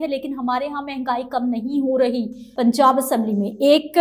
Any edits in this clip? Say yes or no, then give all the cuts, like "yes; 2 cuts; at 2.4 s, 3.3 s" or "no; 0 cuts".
yes; 1 cut; at 2.4 s